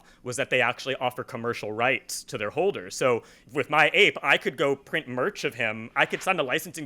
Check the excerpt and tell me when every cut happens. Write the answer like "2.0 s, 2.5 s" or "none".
3.4 s, 5.9 s